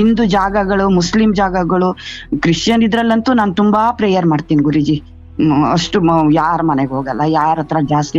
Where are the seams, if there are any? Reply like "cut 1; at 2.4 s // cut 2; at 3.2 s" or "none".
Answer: none